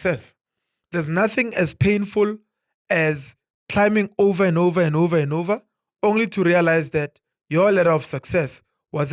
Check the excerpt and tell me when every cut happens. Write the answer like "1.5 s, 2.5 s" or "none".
none

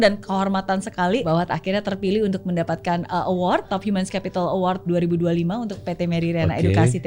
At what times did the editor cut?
1.2 s, 3.7 s, 4.9 s

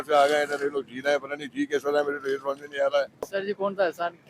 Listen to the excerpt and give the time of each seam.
3.3 s

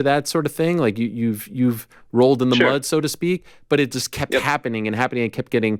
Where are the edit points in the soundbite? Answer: none

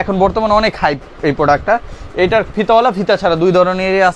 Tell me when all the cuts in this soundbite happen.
none

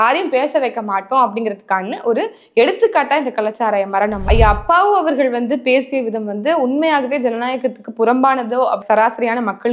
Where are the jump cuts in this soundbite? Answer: 4.3 s, 8.8 s

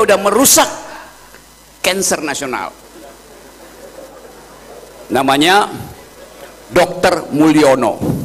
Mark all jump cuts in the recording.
none

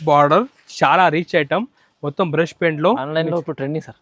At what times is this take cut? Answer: none

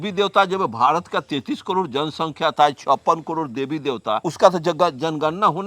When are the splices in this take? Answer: 4.2 s

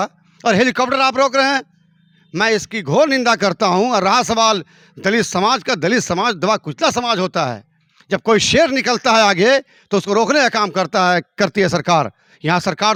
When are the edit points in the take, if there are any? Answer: none

